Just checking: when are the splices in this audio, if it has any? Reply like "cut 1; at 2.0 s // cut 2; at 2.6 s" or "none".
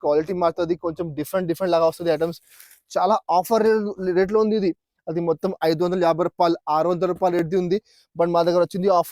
none